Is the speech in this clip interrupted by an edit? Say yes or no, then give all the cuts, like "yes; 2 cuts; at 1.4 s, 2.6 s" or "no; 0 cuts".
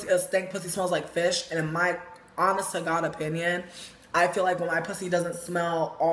yes; 1 cut; at 4.6 s